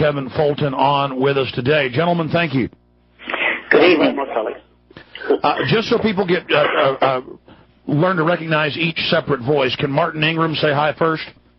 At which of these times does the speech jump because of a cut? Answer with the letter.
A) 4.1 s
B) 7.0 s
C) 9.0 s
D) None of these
D